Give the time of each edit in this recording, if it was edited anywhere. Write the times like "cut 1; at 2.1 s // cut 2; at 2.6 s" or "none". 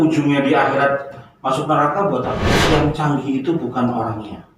cut 1; at 2.5 s